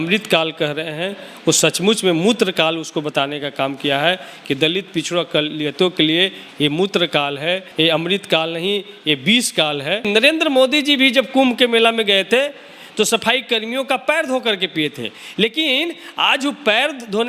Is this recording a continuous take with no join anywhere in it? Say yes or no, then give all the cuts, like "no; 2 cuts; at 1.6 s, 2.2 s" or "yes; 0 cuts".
no; 2 cuts; at 7.7 s, 10.1 s